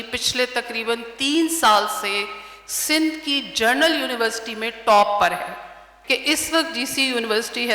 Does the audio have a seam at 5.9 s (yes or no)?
yes